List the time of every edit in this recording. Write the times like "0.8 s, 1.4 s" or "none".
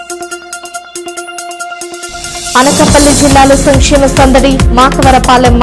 1.9 s